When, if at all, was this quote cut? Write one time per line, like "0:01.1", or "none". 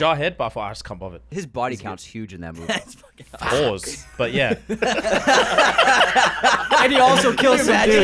0:01.2